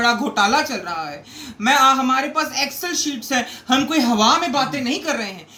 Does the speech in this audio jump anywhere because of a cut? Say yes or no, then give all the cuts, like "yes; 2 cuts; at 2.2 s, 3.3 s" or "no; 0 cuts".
no; 0 cuts